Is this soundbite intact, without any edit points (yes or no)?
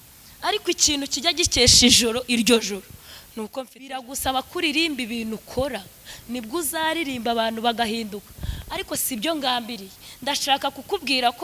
no